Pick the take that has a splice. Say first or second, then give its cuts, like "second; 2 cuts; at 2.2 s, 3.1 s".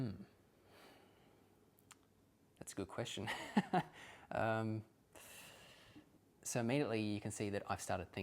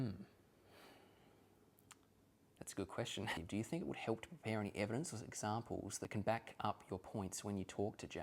second; 2 cuts; at 3.4 s, 6.0 s